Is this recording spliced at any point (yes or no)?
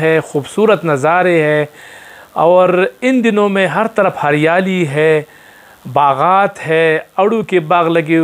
no